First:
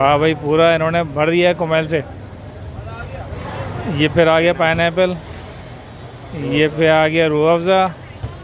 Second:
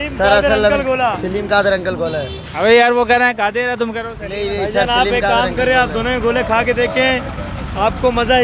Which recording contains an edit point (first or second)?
first